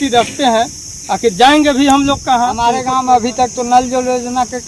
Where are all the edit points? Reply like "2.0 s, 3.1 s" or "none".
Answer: 2.6 s